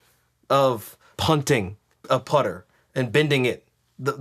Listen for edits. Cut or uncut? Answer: cut